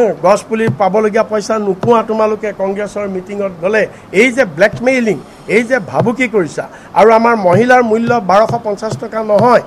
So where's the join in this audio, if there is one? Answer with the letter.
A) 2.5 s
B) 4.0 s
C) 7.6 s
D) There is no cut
D